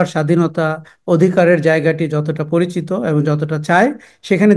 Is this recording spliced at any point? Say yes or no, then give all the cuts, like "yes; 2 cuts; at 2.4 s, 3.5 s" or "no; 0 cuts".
no; 0 cuts